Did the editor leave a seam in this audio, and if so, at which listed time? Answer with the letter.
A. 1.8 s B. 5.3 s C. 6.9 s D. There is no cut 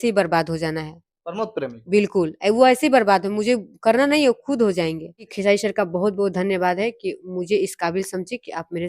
B